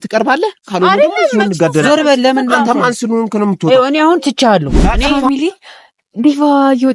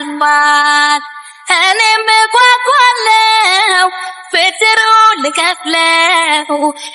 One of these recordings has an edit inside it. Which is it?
first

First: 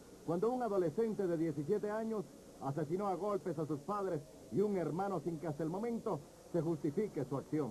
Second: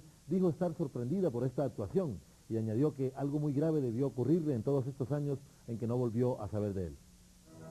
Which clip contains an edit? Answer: first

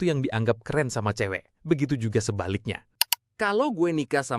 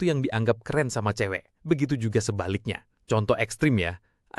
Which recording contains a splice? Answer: first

